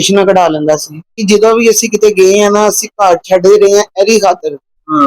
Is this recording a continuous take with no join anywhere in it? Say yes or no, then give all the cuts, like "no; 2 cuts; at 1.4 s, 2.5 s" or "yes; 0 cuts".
no; 1 cut; at 1.2 s